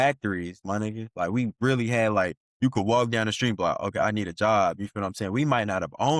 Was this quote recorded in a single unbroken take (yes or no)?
yes